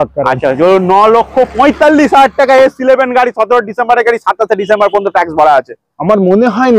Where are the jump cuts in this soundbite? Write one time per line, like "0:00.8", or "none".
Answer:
none